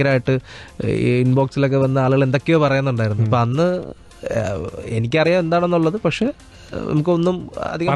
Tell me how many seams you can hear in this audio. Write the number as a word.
zero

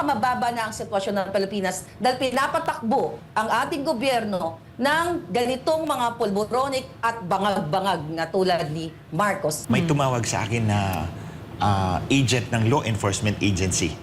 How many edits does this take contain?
one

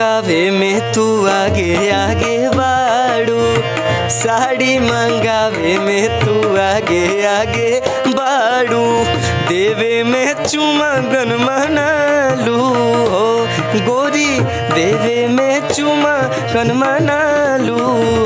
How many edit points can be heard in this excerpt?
zero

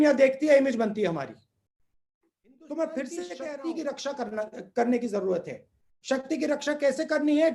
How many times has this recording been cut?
one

